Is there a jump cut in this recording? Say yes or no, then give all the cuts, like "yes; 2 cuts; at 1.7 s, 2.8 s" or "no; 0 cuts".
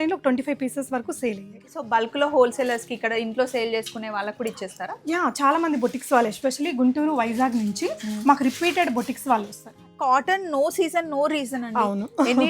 yes; 2 cuts; at 1.7 s, 9.9 s